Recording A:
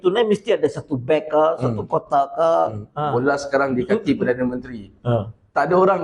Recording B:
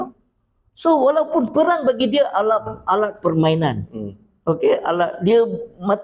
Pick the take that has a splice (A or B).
A